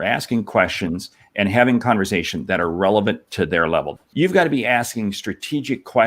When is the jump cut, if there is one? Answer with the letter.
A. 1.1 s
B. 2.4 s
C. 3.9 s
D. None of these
C